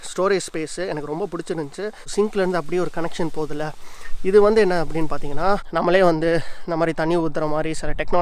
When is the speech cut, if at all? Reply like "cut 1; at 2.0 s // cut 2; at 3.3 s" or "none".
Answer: cut 1; at 2.0 s // cut 2; at 5.6 s